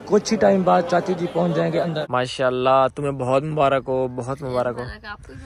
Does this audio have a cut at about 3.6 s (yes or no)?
no